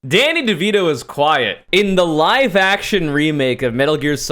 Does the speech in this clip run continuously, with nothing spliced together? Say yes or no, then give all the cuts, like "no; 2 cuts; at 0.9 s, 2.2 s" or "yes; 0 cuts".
no; 1 cut; at 1.6 s